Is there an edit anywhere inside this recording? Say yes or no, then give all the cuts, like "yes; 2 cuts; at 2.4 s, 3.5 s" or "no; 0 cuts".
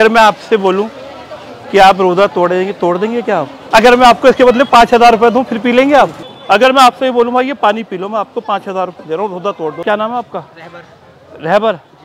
yes; 3 cuts; at 3.6 s, 6.3 s, 9.8 s